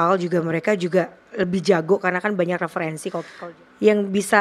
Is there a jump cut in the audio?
yes; 1 cut; at 3.3 s

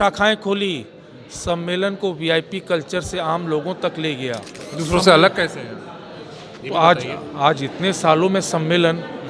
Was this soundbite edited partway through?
yes; 1 cut; at 4.6 s

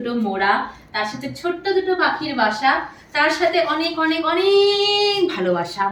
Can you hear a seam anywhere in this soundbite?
no; 0 cuts

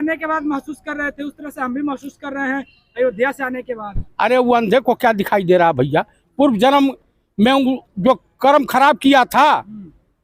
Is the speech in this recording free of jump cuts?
yes; 0 cuts

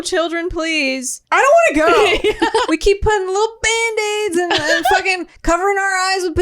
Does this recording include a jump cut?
yes; 1 cut; at 2.6 s

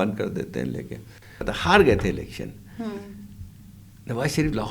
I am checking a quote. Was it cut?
yes; 1 cut; at 1.5 s

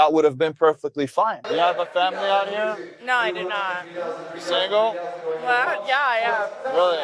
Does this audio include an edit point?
yes; 1 cut; at 1.4 s

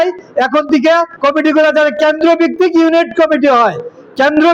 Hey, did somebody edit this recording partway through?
no; 0 cuts

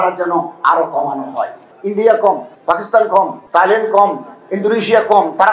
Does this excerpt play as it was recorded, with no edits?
no; 3 cuts; at 1.6 s, 2.5 s, 3.4 s

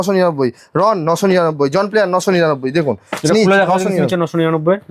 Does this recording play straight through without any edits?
yes; 0 cuts

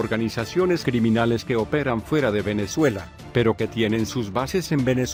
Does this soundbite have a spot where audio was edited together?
no; 0 cuts

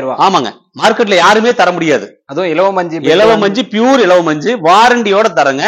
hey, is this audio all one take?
yes; 0 cuts

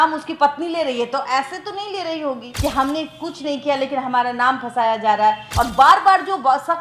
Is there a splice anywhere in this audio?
yes; 2 cuts; at 2.5 s, 5.4 s

